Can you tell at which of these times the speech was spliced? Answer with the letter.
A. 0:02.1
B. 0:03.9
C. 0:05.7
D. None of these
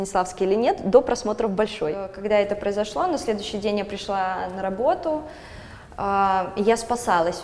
A